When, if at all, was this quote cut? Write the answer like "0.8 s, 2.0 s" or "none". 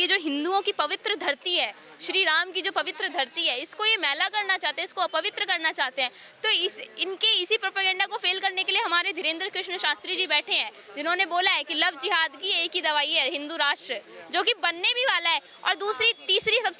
none